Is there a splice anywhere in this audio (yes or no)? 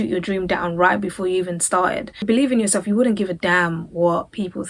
yes